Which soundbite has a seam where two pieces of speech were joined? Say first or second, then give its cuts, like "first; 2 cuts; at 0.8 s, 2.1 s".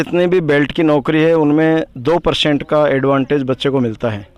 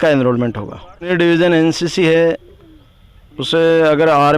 second; 1 cut; at 1.1 s